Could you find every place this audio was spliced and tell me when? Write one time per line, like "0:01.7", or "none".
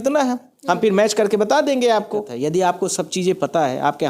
0:02.3